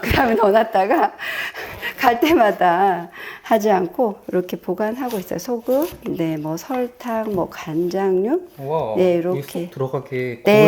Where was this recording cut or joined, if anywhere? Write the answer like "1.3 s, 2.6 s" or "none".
none